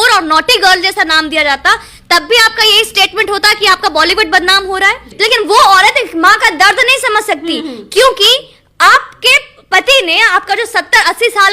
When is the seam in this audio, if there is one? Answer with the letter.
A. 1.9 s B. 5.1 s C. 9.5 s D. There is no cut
B